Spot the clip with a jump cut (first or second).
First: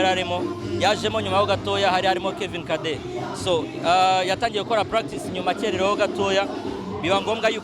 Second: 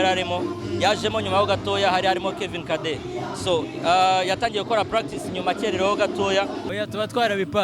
second